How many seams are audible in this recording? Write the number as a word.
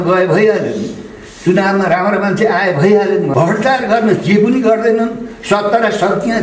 one